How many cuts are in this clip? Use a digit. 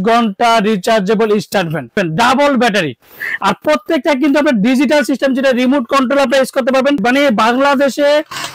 2